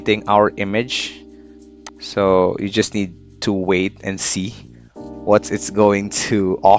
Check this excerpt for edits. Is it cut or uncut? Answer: uncut